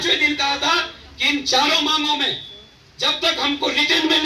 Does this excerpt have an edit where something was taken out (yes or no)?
no